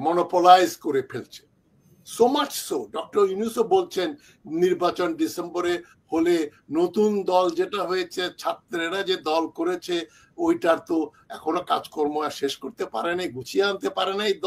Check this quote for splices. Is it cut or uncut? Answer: uncut